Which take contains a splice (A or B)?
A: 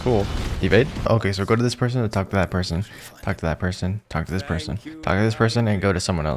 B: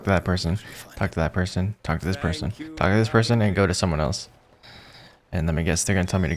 A